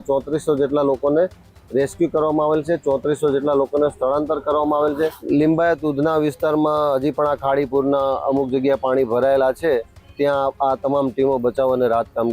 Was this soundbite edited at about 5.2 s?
yes; 1 cut; at 5.2 s

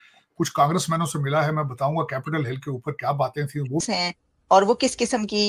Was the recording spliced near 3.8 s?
yes; 1 cut; at 3.8 s

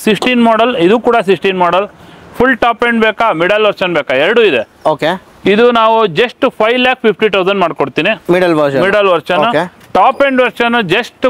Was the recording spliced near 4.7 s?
no; 0 cuts

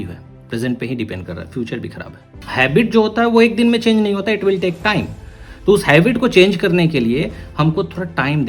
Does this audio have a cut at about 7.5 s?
no; 1 cut; at 2.4 s

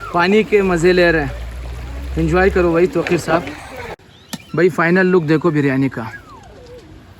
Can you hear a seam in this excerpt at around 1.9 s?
no; 1 cut; at 4.1 s

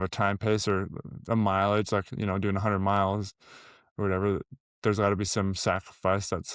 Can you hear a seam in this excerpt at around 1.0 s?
no; 0 cuts

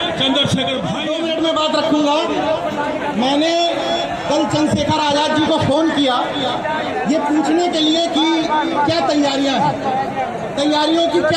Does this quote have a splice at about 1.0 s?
yes; 1 cut; at 1.0 s

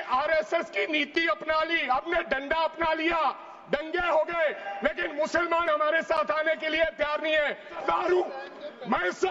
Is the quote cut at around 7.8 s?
yes; 1 cut; at 7.8 s

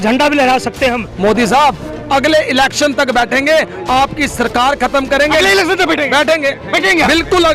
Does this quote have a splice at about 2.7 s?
no; 1 cut; at 1.1 s

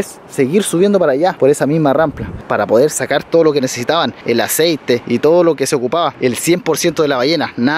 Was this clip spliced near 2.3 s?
yes; 1 cut; at 2.3 s

